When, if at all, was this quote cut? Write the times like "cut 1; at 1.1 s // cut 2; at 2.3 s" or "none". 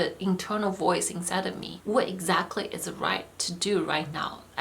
cut 1; at 1.7 s